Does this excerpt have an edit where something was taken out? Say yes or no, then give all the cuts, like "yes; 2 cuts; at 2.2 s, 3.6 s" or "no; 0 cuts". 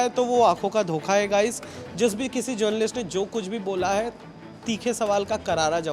no; 0 cuts